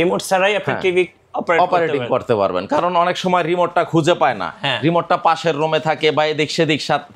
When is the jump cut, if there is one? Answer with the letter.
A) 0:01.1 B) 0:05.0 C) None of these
C